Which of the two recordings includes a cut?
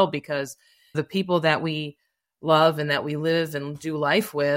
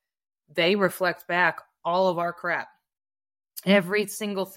first; 1 cut; at 0.9 s

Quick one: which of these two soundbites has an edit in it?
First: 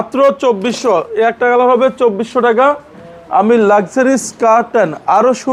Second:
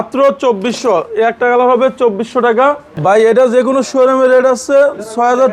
second; 1 cut; at 2.9 s

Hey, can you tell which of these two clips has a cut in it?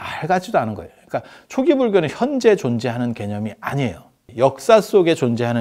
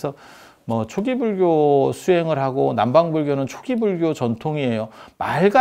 first; 1 cut; at 4.2 s

